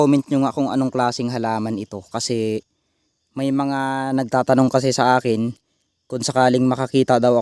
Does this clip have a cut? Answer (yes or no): no